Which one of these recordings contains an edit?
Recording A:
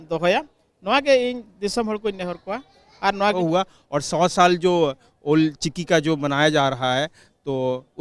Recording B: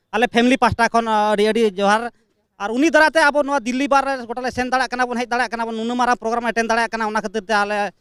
A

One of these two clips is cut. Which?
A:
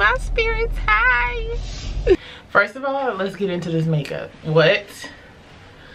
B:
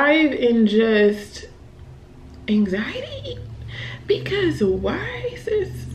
A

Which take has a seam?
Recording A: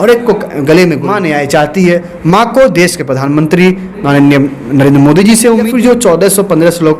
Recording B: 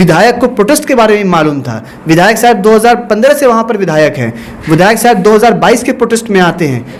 A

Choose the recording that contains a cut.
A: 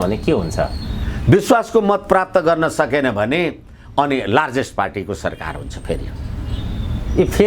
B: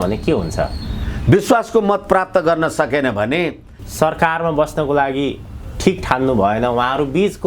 B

